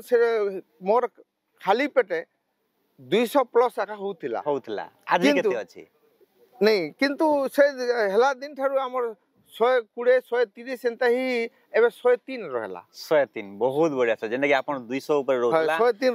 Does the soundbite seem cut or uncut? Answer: uncut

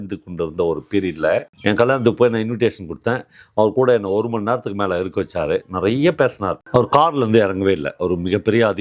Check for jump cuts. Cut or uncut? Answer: cut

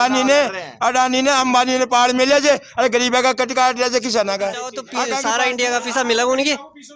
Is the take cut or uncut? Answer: uncut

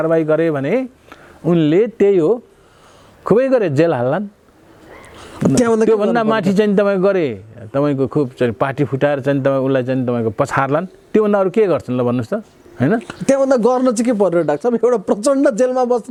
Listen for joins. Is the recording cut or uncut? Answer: uncut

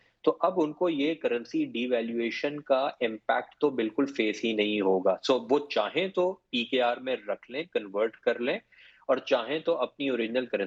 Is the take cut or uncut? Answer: uncut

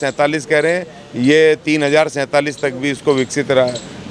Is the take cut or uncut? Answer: uncut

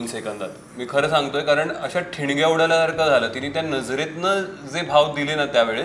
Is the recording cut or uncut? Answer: uncut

